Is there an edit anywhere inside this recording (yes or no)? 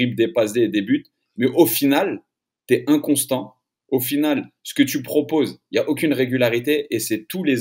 no